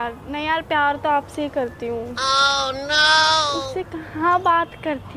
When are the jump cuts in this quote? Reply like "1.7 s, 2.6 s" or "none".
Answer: 2.1 s, 3.6 s